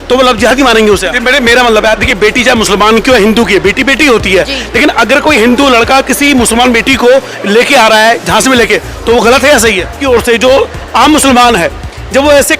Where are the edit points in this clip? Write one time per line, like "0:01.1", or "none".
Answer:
0:01.1
0:10.0